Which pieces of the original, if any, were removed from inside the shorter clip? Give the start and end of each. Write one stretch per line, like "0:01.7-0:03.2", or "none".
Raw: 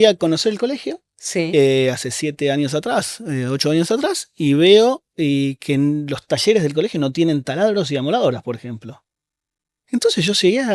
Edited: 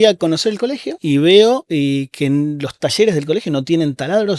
0:00.9-0:04.3
0:05.0-0:05.1